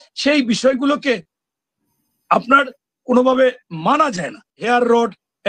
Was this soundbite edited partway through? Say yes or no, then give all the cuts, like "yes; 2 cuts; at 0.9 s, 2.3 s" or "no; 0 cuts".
yes; 1 cut; at 4.5 s